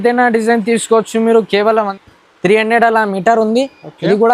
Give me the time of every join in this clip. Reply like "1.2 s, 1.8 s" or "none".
1.9 s